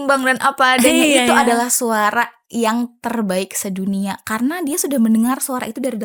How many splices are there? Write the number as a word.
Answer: zero